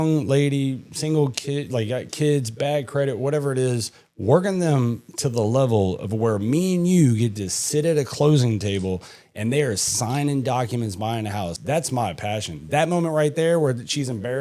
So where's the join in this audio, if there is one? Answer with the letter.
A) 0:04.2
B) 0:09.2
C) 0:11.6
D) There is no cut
C